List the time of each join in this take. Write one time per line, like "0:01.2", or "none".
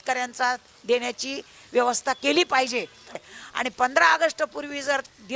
0:03.2